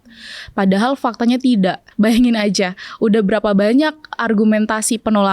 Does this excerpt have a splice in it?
yes; 1 cut; at 1.8 s

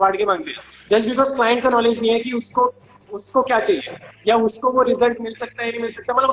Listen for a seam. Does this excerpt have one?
no; 0 cuts

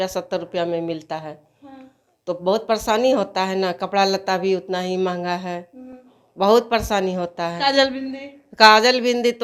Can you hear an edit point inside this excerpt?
no; 0 cuts

